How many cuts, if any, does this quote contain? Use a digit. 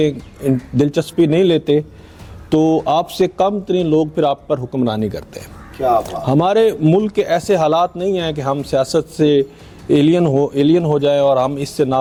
0